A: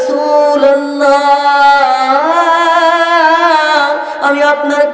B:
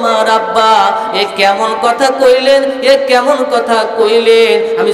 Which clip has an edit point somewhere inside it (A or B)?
A